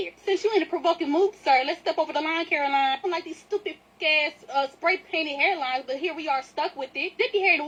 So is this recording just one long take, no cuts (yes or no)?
yes